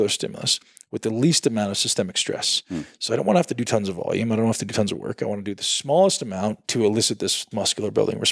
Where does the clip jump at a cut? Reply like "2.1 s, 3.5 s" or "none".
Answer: 6.6 s, 7.4 s